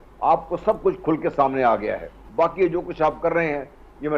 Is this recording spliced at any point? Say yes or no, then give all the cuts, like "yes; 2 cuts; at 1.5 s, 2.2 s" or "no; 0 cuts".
yes; 1 cut; at 2.1 s